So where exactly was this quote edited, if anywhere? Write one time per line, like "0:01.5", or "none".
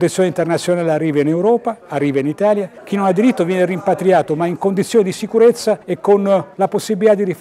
0:02.8
0:05.9
0:06.5